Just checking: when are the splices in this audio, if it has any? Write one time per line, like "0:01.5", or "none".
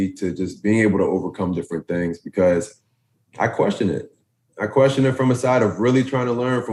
none